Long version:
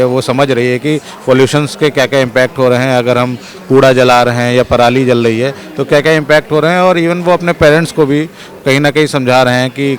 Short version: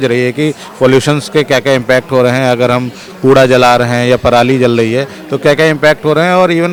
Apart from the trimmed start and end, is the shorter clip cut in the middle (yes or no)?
no